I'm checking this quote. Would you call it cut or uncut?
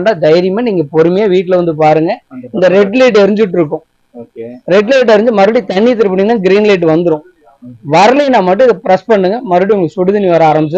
uncut